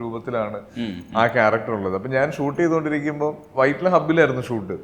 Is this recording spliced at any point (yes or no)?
no